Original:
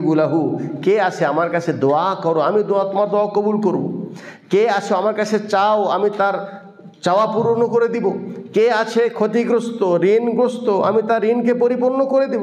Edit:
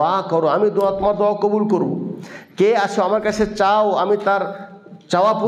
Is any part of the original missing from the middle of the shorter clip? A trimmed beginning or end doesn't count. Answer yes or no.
no